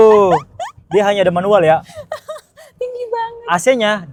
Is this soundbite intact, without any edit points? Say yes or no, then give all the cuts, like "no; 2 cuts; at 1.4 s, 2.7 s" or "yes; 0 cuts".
yes; 0 cuts